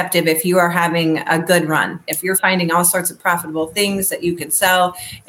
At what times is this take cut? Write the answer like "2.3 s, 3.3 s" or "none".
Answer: 2.1 s